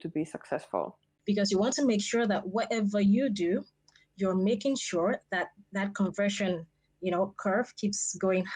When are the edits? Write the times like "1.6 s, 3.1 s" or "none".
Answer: 1.1 s